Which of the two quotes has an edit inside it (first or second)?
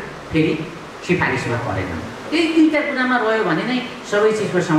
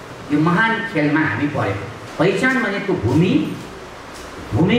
second